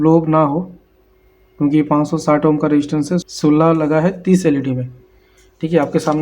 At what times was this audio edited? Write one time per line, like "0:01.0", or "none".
0:03.2